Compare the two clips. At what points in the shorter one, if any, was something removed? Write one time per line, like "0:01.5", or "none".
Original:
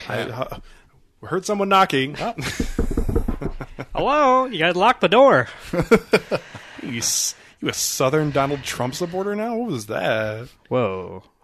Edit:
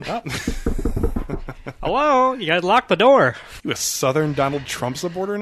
0:03.5